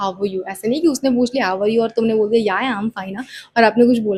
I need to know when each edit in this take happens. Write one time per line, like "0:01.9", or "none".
none